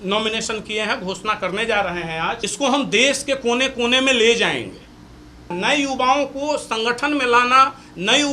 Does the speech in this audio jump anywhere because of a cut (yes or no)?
yes